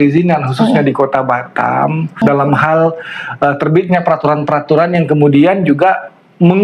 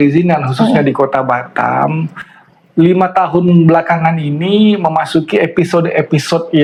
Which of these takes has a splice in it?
first; 1 cut; at 2.2 s

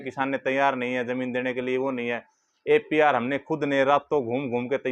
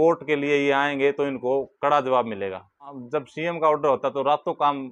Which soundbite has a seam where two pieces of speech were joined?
second; 1 cut; at 3.0 s

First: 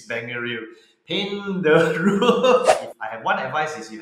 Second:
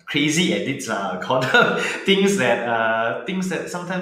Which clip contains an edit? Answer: first; 1 cut; at 2.8 s

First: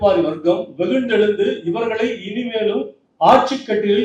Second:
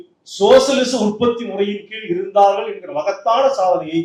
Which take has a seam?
first; 1 cut; at 3.0 s

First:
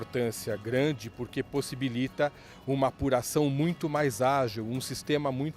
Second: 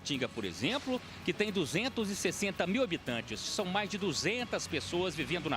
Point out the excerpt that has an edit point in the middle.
second; 1 cut; at 3.5 s

